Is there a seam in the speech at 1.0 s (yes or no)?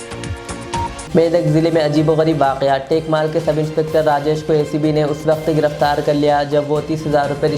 no